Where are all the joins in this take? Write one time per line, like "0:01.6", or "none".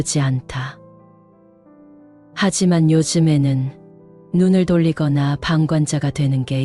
none

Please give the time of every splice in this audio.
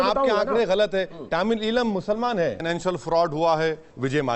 0:02.6

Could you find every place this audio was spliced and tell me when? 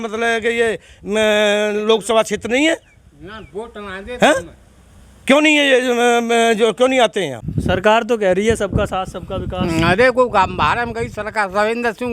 0:07.4

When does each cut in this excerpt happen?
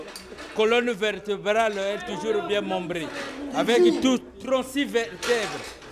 none

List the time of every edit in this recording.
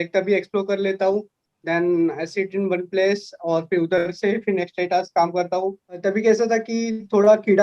0:06.0

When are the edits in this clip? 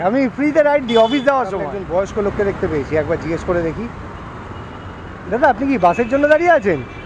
0:01.7

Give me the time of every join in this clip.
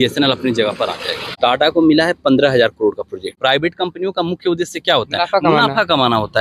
0:01.3
0:03.4

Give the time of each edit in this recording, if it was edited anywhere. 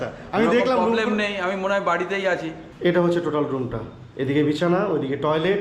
0:02.6

